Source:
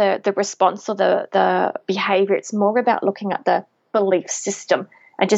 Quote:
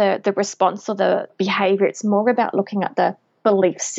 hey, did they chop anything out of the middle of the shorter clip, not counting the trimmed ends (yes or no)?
yes